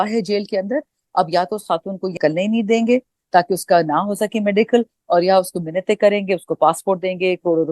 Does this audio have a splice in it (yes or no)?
yes